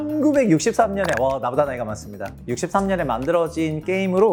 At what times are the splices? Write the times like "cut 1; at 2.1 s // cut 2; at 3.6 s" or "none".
none